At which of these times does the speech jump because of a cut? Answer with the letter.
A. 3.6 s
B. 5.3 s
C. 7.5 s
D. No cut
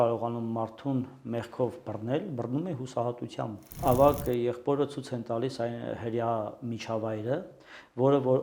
A